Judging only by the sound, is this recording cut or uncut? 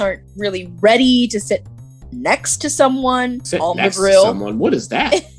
cut